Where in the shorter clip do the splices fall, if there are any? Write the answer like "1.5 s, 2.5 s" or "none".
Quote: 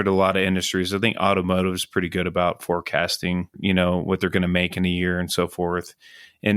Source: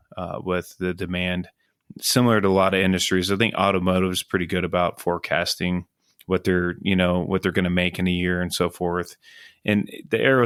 3.6 s

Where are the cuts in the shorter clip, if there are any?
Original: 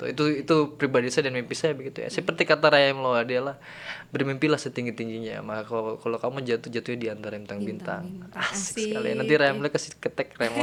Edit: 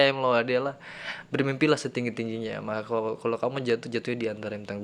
none

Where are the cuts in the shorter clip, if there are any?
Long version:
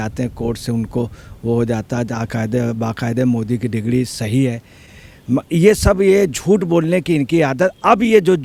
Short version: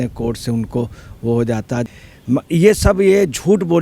1.9 s

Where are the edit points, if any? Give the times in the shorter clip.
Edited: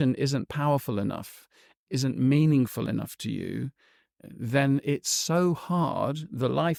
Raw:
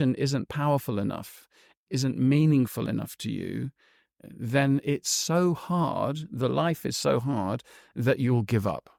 none

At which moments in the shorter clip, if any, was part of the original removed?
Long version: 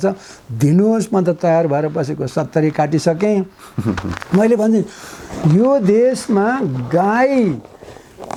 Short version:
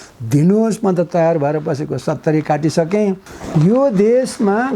3.3 s

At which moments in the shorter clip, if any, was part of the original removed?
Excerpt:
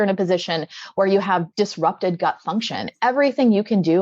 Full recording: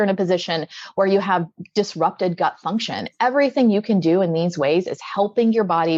1.5 s

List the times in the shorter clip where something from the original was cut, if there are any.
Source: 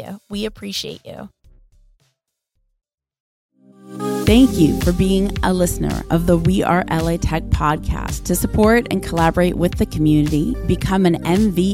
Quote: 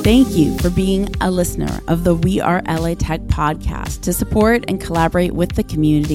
none

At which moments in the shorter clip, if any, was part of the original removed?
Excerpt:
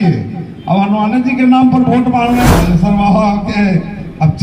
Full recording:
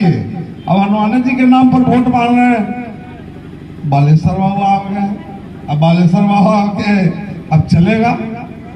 2.5 s

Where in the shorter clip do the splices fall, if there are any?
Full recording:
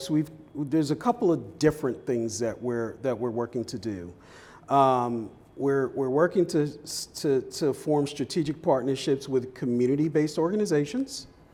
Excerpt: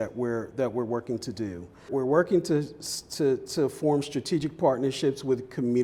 1.9 s

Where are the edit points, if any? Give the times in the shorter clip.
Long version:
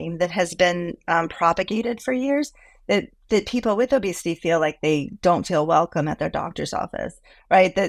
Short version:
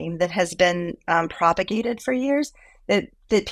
none

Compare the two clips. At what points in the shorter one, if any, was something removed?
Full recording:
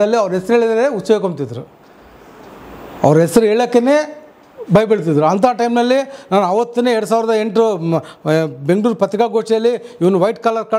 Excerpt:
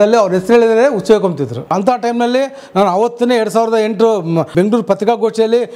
1.7 s, 4.5 s

